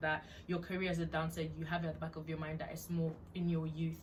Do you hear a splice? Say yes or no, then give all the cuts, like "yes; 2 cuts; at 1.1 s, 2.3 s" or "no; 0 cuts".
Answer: no; 0 cuts